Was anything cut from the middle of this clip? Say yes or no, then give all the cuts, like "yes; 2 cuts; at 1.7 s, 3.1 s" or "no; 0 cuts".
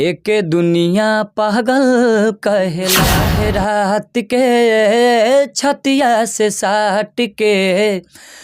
yes; 1 cut; at 3.1 s